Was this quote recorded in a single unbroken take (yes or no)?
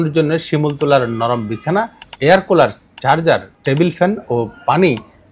no